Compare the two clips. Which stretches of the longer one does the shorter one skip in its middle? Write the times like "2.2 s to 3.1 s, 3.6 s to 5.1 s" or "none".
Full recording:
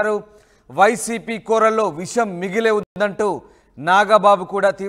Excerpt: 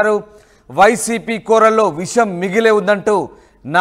2.8 s to 3.0 s